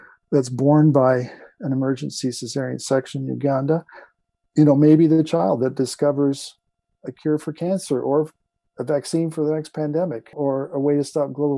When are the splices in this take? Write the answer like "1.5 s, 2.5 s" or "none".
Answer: 10.3 s

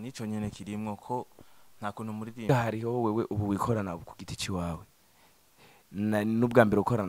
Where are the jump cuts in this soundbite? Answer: 2.5 s

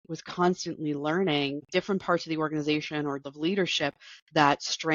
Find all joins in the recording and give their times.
1.7 s, 3.2 s

